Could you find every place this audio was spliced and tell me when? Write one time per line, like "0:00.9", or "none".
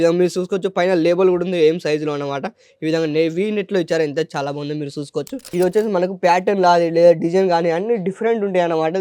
0:05.4